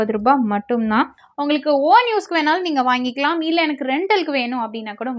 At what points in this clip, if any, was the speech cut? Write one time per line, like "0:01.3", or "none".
0:01.2